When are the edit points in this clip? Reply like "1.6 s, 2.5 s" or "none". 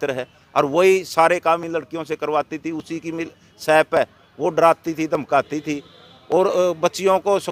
none

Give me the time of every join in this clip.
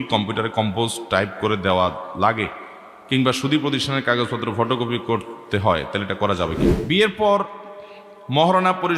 6.8 s

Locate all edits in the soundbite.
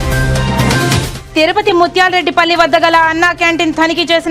1.2 s

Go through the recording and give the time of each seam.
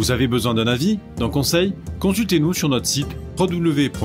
none

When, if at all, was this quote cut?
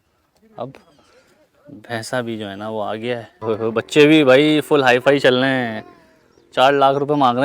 3.4 s

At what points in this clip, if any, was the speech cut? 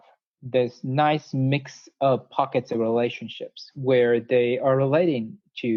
none

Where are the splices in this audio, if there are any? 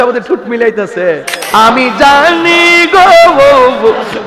1.4 s

